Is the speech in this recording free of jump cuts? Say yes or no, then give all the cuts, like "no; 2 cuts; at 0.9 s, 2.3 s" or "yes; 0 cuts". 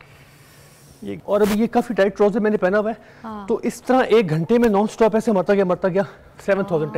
no; 1 cut; at 1.1 s